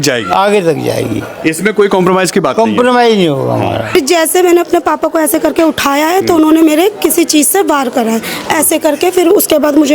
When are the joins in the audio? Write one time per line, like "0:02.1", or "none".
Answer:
0:03.9